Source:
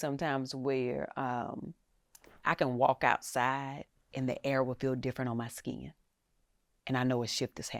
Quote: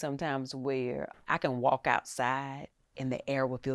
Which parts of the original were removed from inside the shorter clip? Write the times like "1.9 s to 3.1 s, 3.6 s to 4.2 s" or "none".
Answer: 1.1 s to 2.3 s

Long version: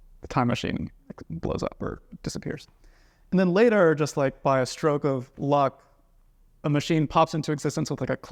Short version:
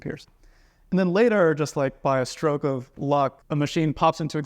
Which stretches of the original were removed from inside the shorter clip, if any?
5.8 s to 6.6 s

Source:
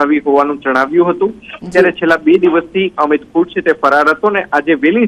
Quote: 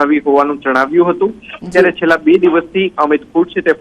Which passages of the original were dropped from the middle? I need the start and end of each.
none

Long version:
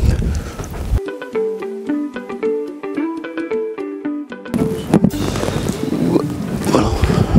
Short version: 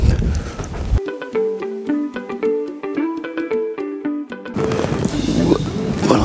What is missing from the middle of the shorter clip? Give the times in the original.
4.5 s to 5.1 s

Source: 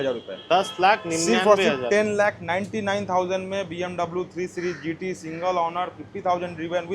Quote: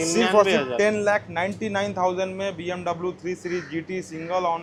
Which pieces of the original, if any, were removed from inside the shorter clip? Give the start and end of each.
none

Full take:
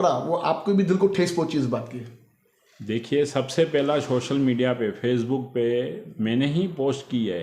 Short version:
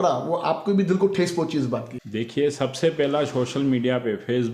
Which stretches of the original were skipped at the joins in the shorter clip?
2.0 s to 2.7 s

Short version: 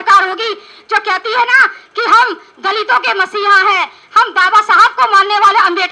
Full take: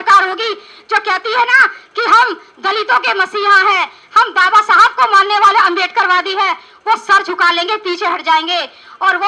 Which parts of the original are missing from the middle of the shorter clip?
none

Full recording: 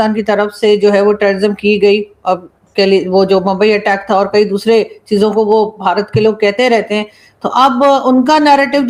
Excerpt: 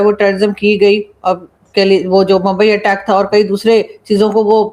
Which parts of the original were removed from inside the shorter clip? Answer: none

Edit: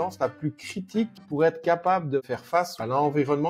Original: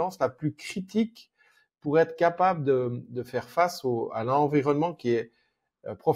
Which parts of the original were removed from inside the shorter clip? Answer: 1.2 s to 1.7 s, 3.2 s to 4.1 s

